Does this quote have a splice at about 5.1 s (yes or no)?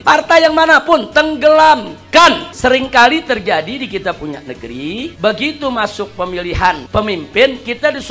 yes